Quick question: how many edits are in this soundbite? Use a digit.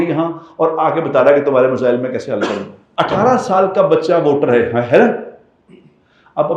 1